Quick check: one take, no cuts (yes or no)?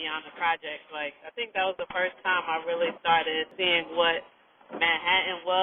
no